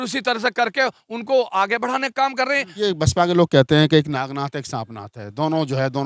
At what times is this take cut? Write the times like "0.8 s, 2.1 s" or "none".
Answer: 2.8 s